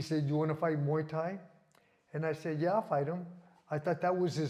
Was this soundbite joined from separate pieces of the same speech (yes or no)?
no